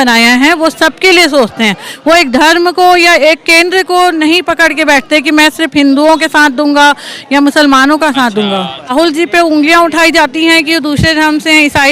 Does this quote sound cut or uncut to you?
cut